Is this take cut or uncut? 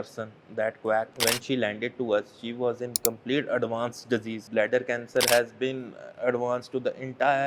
cut